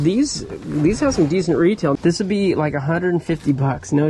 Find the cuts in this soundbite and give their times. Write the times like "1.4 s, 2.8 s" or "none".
1.9 s